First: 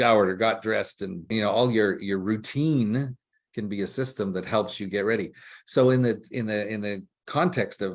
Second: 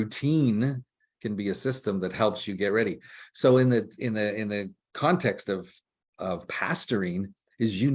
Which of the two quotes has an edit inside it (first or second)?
first